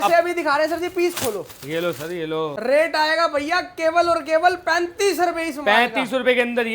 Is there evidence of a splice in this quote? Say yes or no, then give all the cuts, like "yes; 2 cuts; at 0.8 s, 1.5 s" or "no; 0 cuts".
yes; 1 cut; at 2.5 s